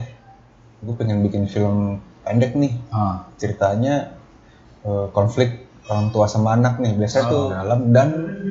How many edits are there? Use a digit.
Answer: 1